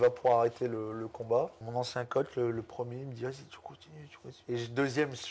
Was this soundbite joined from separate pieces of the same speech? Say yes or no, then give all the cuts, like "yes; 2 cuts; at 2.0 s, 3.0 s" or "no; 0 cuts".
yes; 2 cuts; at 1.6 s, 4.3 s